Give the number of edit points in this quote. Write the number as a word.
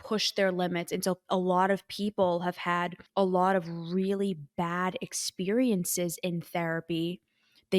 one